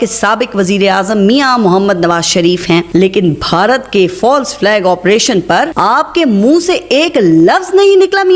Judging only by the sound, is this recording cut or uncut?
cut